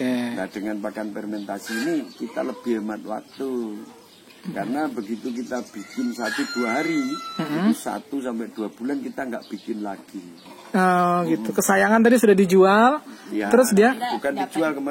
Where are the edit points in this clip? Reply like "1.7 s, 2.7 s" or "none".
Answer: 10.4 s